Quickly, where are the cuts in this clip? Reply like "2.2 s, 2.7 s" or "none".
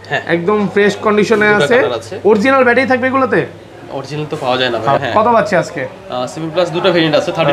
5.0 s